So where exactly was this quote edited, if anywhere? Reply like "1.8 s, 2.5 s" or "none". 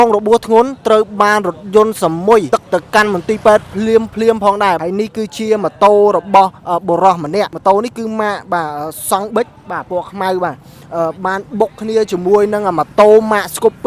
2.5 s, 4.8 s, 7.5 s